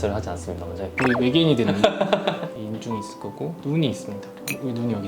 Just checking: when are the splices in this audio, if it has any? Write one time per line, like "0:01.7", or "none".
0:00.9
0:02.5